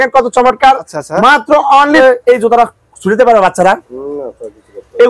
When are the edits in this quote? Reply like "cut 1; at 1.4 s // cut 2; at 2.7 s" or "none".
cut 1; at 2.0 s